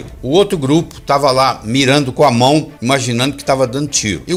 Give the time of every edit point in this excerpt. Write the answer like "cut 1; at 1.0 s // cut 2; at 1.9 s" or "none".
none